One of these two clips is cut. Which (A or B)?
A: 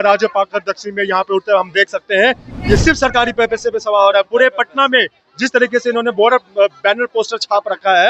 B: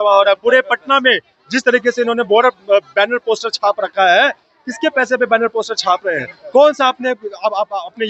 A